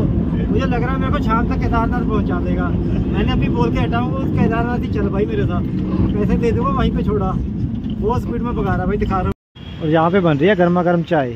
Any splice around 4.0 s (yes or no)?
no